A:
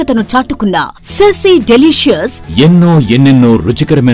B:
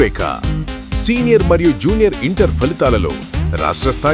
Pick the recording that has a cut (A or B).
A